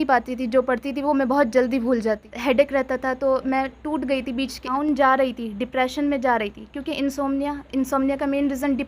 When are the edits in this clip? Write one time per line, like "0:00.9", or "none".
0:02.3
0:04.7